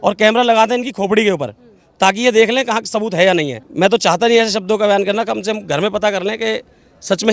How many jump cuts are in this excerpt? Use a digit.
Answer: 1